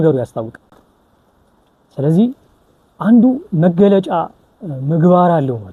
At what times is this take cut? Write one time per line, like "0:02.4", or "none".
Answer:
none